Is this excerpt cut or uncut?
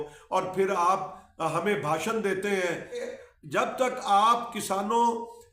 cut